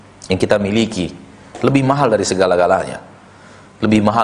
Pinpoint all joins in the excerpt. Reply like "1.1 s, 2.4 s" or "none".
none